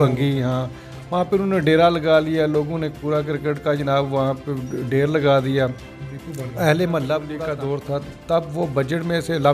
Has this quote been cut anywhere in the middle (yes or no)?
yes